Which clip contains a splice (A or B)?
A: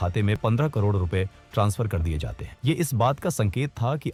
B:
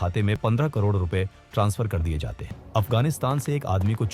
B